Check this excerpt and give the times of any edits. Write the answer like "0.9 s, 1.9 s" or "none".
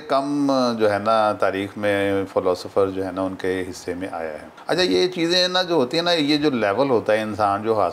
none